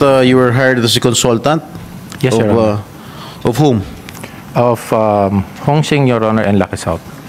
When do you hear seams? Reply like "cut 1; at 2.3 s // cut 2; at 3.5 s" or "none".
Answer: none